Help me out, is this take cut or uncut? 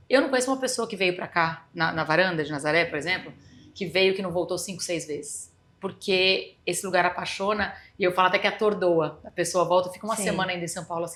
uncut